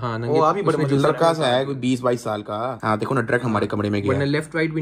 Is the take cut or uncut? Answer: uncut